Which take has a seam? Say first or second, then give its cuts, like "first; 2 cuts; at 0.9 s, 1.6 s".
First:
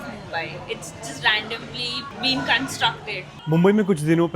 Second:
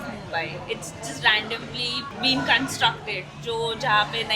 first; 1 cut; at 3.3 s